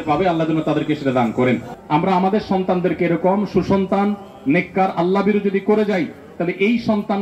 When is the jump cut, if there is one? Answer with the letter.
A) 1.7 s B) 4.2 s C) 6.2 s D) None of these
A